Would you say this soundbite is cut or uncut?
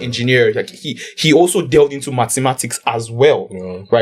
uncut